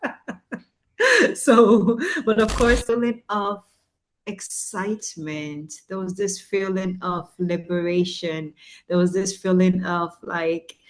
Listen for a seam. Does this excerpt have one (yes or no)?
yes